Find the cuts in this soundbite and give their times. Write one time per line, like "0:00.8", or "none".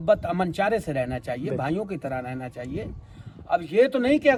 none